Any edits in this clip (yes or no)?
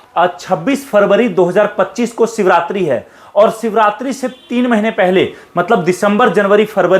no